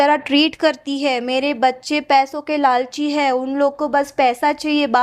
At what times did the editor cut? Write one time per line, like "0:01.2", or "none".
none